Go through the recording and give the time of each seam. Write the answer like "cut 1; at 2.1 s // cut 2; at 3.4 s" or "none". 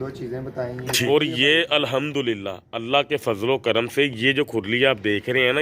cut 1; at 1.0 s